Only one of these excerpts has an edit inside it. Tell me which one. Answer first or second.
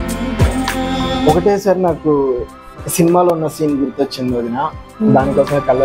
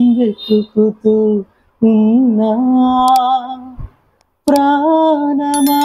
first